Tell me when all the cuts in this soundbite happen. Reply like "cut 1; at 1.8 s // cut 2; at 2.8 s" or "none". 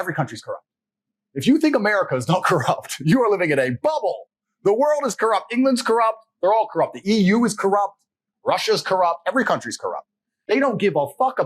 cut 1; at 10.3 s